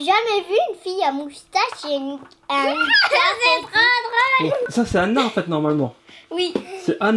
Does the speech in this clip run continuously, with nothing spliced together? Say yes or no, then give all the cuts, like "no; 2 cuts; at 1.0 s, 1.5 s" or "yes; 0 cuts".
no; 1 cut; at 4.6 s